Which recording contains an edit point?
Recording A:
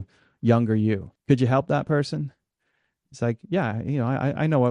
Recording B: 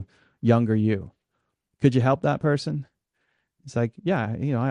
A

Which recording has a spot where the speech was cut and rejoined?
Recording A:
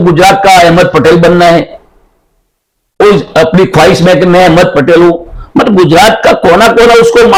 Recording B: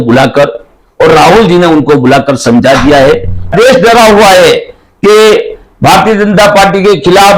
B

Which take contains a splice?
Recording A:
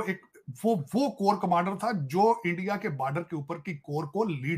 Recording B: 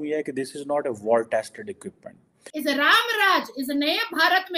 B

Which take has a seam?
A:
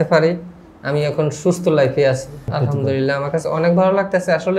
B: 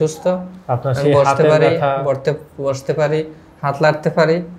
A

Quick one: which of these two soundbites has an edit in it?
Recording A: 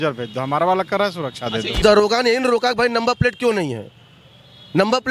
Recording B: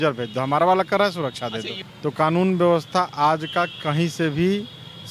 A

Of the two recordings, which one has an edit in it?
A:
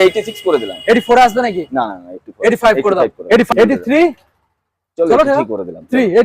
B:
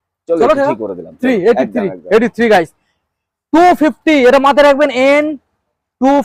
A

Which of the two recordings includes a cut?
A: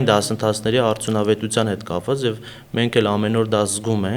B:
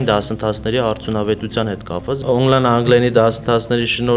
B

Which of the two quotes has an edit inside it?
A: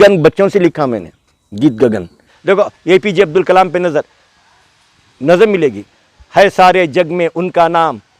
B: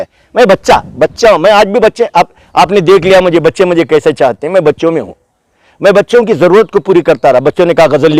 A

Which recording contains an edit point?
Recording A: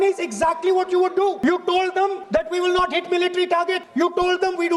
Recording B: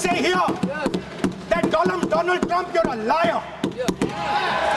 A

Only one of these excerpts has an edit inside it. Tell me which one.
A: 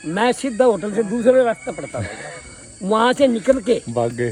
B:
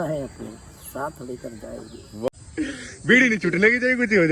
B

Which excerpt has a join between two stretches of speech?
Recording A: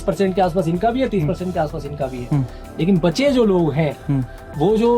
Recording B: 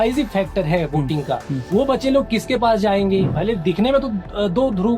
B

